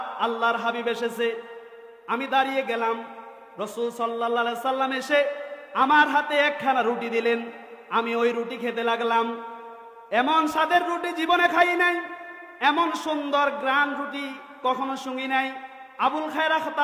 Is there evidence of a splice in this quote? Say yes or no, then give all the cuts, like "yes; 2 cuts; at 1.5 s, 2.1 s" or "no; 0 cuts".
no; 0 cuts